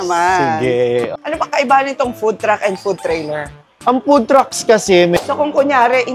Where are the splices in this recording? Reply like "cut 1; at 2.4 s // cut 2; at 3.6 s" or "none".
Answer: cut 1; at 1.2 s // cut 2; at 5.2 s